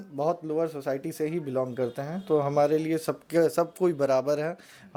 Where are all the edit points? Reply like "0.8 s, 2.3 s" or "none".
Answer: none